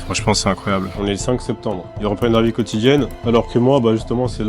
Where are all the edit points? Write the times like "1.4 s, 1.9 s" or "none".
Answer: 0.9 s